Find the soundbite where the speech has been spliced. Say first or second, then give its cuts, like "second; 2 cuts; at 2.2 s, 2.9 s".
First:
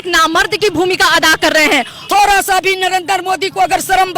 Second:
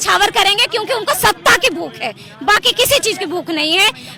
first; 1 cut; at 2.0 s